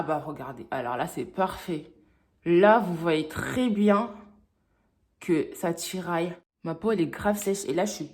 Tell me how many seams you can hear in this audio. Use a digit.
1